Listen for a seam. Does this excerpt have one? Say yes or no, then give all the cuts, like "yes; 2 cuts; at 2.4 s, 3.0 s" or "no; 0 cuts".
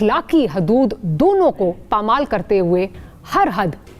yes; 1 cut; at 3.0 s